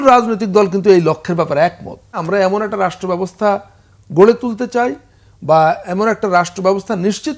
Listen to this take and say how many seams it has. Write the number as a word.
one